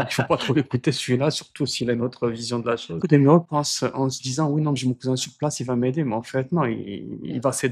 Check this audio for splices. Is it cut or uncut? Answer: cut